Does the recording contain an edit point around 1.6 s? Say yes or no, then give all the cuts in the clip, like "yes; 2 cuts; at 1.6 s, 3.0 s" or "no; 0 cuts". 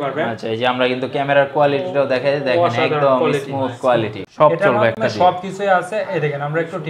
no; 1 cut; at 4.2 s